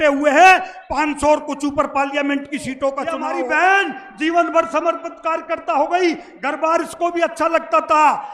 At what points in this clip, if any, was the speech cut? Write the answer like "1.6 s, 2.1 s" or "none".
3.2 s